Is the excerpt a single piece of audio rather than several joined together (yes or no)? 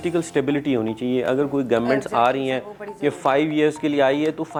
yes